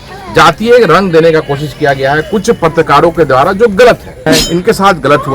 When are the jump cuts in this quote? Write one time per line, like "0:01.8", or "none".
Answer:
0:04.2